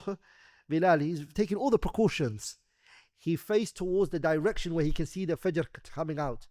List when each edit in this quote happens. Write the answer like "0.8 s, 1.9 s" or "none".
none